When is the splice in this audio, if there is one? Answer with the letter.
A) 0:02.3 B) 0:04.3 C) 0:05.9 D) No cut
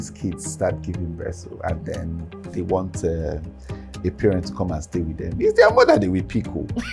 D